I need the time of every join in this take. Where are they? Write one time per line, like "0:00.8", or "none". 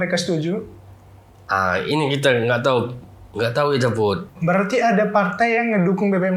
0:04.4